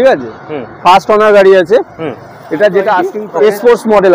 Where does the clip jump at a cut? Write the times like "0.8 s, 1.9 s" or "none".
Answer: 3.2 s

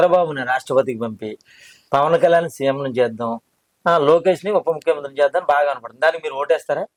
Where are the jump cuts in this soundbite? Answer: none

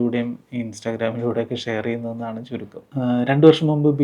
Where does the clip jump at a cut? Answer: 2.8 s

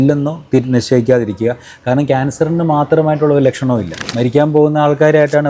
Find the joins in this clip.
4.0 s

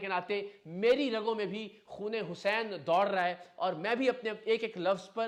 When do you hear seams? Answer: none

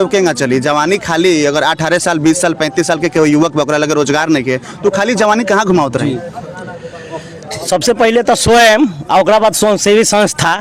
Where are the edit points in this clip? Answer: none

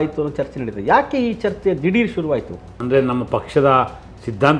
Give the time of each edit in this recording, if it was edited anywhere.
2.7 s

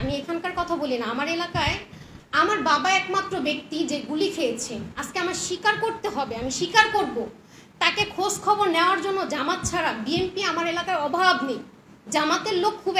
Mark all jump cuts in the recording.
none

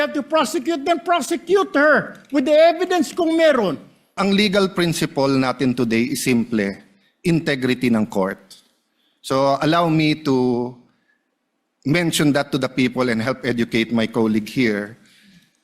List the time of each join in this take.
4.2 s

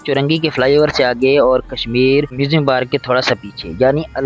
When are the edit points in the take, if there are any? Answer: 2.3 s

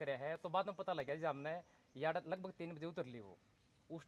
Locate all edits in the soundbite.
none

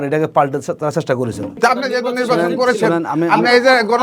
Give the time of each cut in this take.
1.5 s

